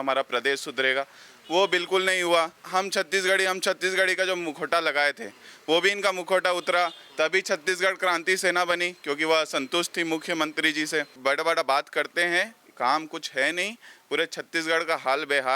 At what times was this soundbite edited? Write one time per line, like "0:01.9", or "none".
0:02.6
0:11.1